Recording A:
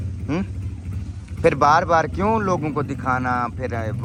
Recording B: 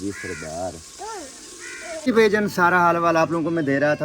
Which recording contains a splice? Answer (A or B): B